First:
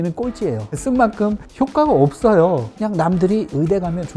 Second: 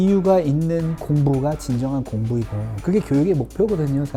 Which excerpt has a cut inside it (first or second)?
first